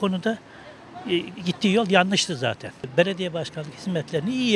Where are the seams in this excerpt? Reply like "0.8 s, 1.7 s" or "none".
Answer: 2.7 s